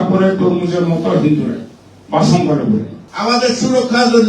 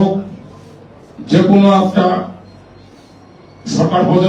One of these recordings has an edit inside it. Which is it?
first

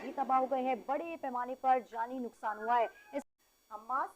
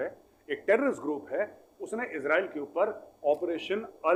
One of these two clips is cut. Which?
first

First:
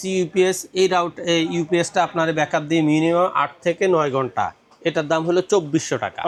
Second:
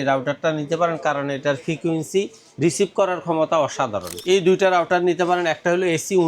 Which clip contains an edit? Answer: second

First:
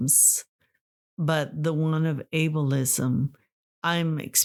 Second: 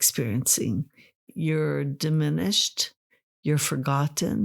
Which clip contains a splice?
second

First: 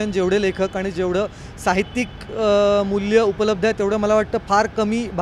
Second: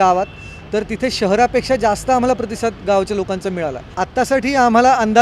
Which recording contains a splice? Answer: second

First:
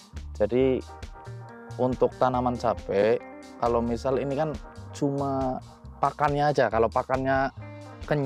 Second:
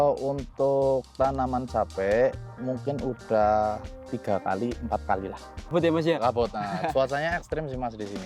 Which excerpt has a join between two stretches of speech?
second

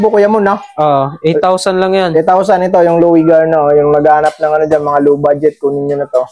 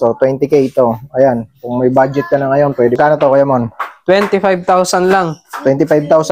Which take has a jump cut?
second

